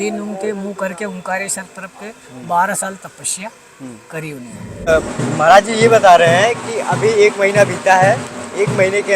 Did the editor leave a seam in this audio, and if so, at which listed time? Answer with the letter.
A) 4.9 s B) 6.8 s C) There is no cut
A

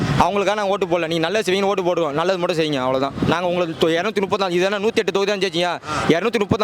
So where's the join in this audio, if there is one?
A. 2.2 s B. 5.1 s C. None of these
C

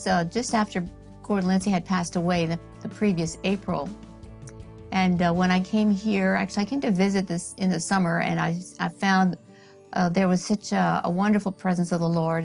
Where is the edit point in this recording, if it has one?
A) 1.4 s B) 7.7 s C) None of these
B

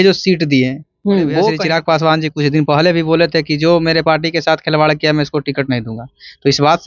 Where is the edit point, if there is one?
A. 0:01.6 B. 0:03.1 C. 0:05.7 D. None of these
A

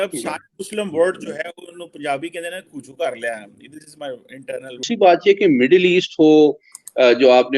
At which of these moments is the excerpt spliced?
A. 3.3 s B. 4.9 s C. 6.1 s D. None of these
B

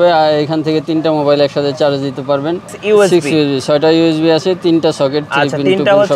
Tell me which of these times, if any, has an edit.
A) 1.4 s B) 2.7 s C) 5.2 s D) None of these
B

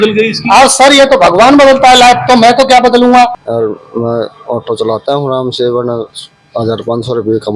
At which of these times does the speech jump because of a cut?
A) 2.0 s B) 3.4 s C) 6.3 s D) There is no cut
B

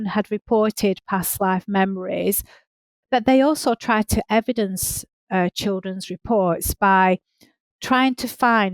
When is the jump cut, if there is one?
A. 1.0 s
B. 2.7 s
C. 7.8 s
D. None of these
B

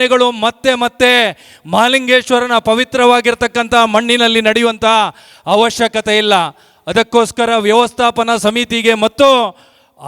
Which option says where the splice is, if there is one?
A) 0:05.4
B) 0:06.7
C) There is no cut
C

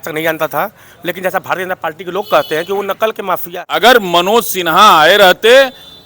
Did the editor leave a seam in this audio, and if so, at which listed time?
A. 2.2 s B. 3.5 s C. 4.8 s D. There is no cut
B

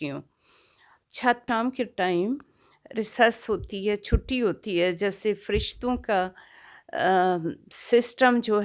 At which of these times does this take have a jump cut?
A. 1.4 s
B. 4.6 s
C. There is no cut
A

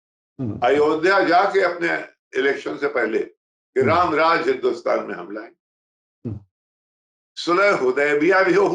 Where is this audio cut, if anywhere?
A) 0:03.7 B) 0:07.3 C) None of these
B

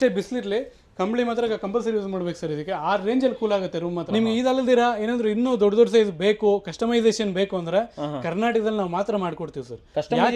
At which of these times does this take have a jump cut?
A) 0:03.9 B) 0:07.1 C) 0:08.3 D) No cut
A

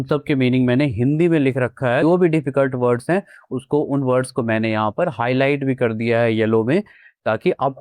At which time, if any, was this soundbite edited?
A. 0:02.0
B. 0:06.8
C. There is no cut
A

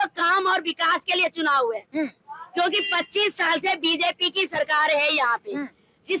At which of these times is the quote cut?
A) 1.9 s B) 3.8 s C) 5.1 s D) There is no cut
D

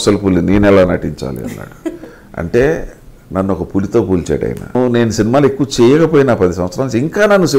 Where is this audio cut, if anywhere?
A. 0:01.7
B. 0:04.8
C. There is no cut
B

